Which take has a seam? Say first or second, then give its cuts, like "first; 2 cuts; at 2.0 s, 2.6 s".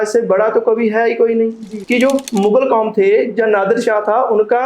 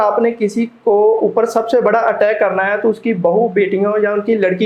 first; 1 cut; at 1.7 s